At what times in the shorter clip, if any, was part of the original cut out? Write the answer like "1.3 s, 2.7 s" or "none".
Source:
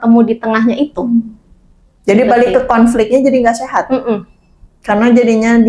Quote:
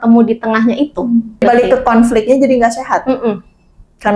1.4 s